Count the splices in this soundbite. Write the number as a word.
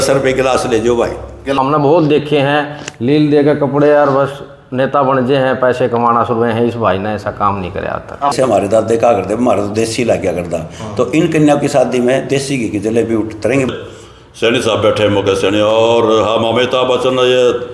three